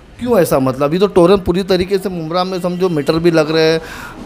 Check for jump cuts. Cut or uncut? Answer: uncut